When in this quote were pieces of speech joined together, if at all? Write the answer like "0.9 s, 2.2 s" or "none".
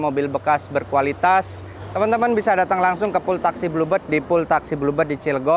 1.8 s